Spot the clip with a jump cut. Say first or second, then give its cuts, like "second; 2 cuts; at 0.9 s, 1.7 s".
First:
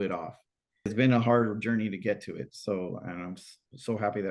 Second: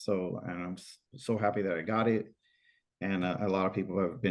first; 1 cut; at 0.9 s